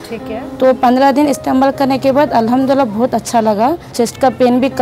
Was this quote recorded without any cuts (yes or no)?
no